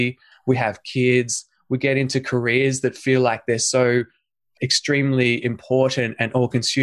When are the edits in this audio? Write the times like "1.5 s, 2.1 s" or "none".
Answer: 4.5 s